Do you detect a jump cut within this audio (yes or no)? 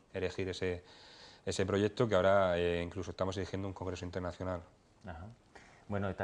no